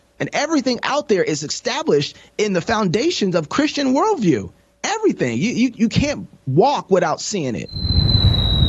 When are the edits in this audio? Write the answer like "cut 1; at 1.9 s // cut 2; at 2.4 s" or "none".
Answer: cut 1; at 7.7 s